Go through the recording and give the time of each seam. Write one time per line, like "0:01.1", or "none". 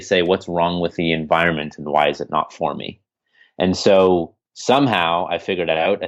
none